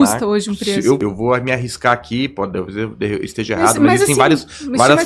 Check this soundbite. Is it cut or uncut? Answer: cut